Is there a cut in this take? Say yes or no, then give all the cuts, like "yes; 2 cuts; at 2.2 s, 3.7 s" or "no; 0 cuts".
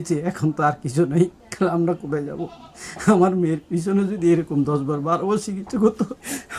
yes; 1 cut; at 1.4 s